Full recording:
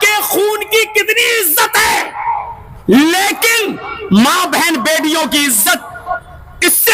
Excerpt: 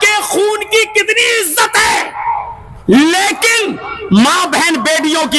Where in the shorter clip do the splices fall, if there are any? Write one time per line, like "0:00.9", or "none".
none